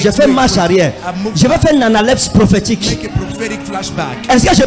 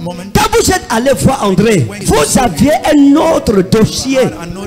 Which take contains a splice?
second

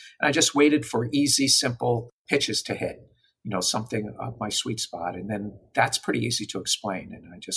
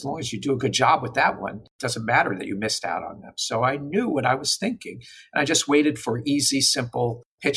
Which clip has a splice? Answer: second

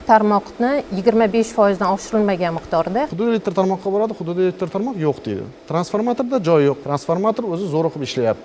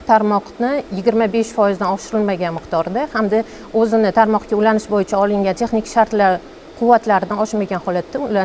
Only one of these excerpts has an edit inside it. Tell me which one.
first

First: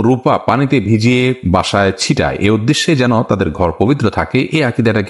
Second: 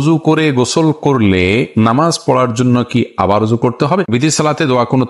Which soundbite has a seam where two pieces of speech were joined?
second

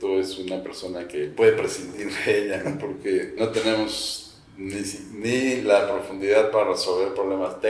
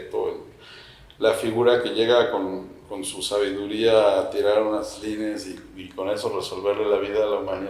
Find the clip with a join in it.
first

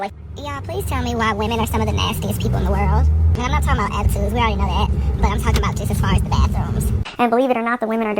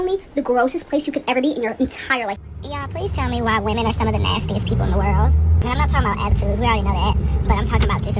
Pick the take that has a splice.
first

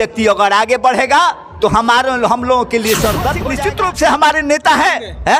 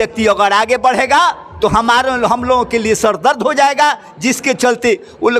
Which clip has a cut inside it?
first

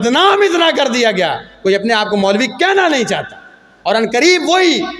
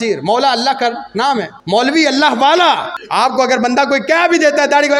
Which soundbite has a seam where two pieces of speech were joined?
second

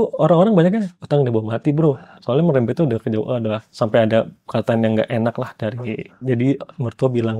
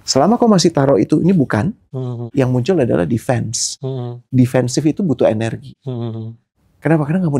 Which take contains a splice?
first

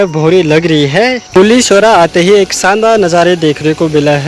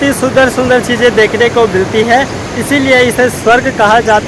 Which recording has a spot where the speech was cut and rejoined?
first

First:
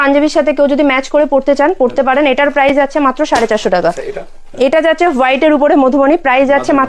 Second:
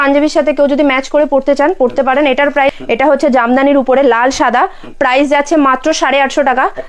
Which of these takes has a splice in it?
second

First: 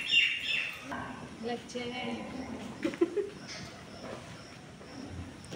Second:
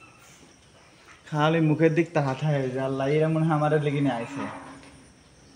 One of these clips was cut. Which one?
first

